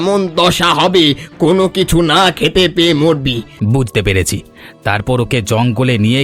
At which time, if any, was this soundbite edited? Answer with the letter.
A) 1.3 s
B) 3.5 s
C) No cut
B